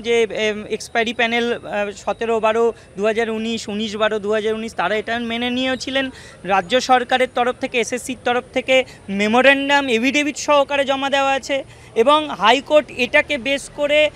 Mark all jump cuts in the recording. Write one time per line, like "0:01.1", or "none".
none